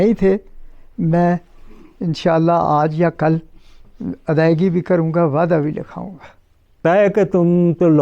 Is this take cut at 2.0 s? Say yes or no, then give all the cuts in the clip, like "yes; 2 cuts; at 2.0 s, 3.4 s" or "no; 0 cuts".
no; 1 cut; at 6.8 s